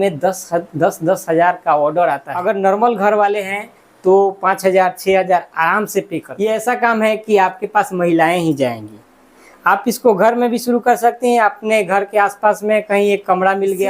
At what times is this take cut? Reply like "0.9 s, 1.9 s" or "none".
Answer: 2.4 s, 6.2 s